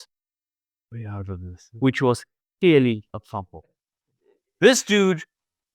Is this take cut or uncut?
uncut